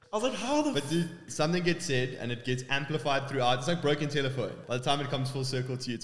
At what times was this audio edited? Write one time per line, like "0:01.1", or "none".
0:01.2
0:04.6